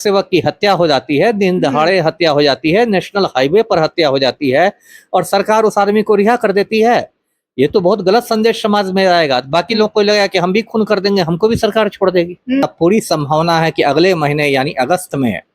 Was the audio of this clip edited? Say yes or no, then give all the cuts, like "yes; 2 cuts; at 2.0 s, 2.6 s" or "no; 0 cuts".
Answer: yes; 1 cut; at 12.6 s